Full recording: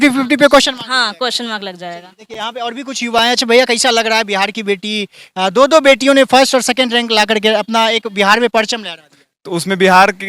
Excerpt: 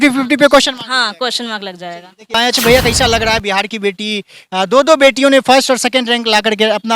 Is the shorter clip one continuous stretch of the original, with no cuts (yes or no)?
no